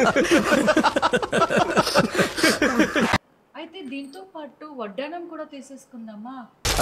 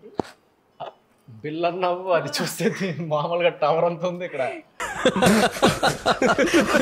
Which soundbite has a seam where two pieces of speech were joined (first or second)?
first